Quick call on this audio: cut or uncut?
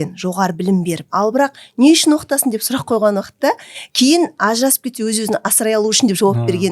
cut